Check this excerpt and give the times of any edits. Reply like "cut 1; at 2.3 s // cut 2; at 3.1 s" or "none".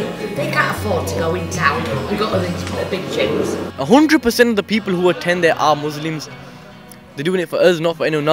cut 1; at 3.7 s

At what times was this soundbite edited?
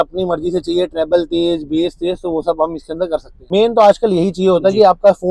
cut 1; at 3.5 s

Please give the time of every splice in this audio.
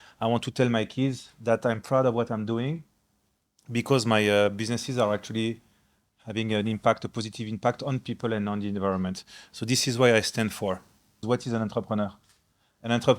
cut 1; at 11.2 s

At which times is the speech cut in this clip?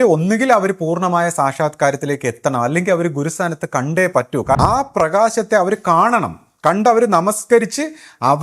cut 1; at 4.6 s

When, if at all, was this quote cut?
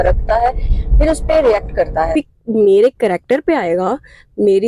cut 1; at 2.1 s

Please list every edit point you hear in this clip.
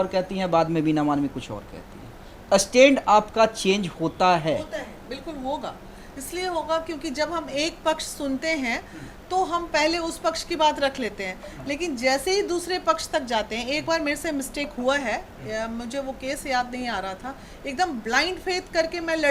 none

